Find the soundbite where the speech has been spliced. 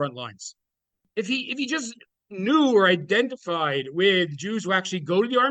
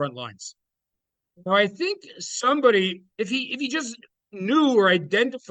first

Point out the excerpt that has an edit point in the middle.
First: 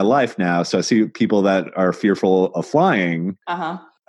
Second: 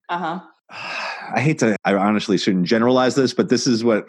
second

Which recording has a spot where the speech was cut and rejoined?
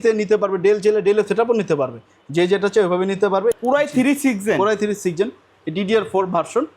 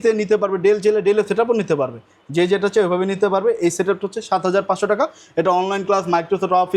first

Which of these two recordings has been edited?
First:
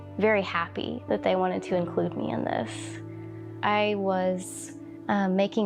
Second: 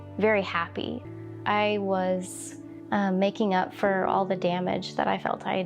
second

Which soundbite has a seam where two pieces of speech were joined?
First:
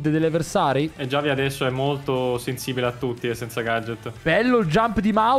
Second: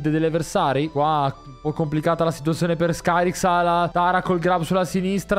first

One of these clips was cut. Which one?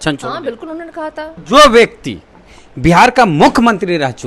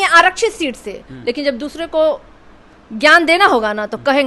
first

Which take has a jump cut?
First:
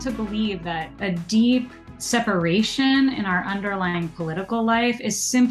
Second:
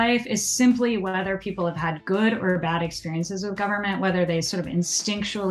first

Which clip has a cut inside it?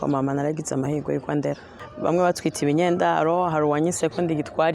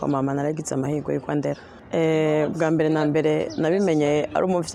first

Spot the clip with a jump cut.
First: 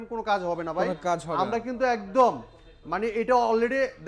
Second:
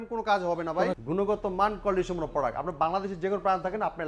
second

